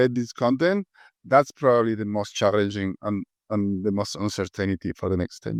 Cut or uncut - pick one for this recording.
uncut